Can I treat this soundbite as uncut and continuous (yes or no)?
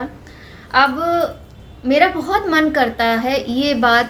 yes